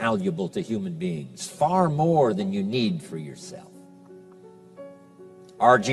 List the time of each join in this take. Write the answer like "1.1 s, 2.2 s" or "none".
2.7 s